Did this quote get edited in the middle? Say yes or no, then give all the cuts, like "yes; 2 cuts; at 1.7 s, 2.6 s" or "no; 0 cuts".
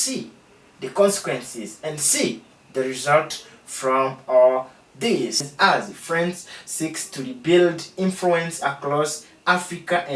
yes; 1 cut; at 5.5 s